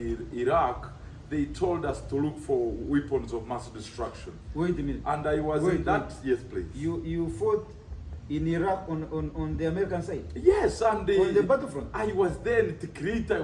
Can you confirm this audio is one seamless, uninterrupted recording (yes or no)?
yes